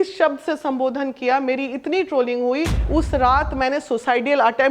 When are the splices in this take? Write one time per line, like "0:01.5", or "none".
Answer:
0:02.8